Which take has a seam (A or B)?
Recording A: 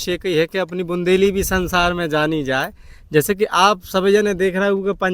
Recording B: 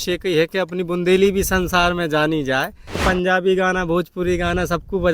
B